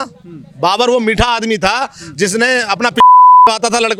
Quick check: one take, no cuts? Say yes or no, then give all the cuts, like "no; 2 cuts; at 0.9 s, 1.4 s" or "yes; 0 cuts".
yes; 0 cuts